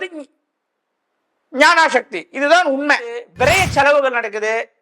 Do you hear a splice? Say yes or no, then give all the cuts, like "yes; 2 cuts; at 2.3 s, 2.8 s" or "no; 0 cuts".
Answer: yes; 1 cut; at 3.3 s